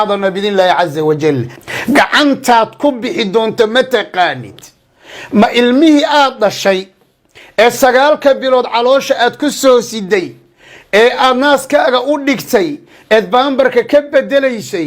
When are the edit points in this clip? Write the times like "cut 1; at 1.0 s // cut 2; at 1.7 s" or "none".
cut 1; at 1.5 s